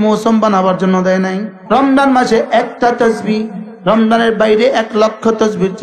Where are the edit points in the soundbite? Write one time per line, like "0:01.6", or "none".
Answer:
0:01.5